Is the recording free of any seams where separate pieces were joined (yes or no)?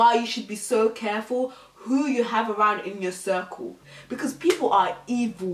no